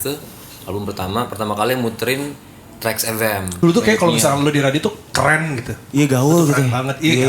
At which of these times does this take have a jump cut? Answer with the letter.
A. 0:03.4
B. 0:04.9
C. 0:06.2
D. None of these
A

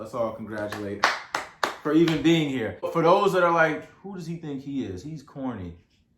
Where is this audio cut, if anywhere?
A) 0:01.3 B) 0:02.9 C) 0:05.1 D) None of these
B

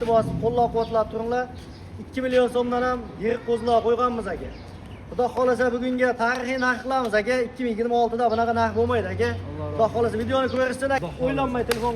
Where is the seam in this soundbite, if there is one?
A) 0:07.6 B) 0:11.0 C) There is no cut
B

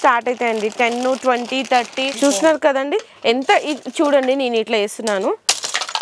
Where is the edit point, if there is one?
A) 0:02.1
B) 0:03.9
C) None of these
A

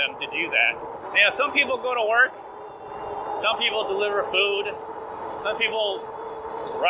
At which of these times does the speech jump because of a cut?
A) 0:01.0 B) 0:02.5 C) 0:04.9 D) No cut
A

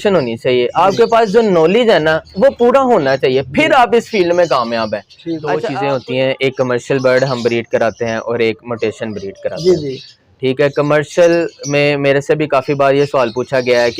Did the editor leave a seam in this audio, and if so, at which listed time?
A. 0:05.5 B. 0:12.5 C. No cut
A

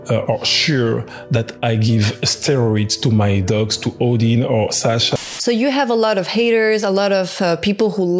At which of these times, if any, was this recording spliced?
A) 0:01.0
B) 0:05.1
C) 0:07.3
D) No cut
B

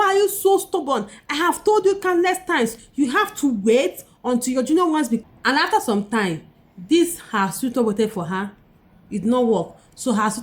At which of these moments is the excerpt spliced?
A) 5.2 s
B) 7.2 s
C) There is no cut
A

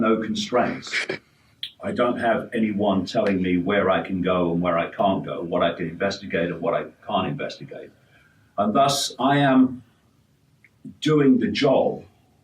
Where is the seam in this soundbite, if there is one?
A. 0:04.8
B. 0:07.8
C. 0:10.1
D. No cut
A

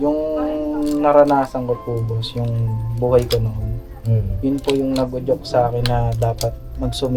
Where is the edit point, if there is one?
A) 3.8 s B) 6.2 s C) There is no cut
C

